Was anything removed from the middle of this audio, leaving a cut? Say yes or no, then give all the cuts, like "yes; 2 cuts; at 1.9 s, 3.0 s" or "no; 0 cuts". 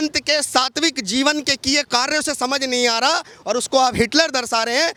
no; 0 cuts